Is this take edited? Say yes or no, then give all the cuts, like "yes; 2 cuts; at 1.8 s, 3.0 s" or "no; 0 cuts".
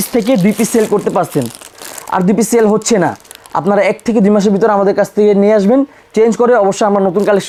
no; 0 cuts